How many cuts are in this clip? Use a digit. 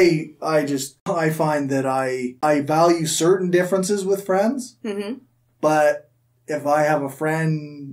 2